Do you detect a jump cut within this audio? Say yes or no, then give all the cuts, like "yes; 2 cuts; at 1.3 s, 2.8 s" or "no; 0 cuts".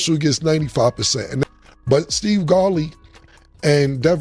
yes; 1 cut; at 1.4 s